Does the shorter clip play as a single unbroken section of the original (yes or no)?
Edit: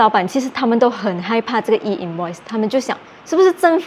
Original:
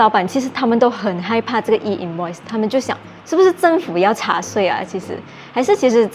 yes